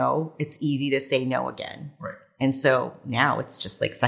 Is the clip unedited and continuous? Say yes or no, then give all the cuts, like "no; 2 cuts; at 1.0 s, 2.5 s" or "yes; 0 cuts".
yes; 0 cuts